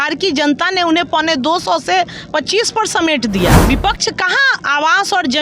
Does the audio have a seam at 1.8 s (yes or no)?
no